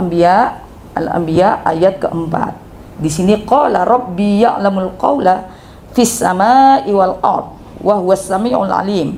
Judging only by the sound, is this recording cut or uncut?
uncut